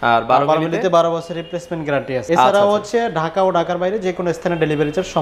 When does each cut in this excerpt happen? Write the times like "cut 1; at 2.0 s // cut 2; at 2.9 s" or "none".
cut 1; at 2.2 s